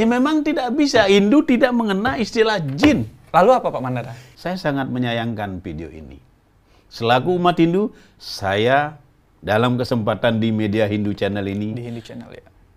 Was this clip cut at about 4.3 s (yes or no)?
yes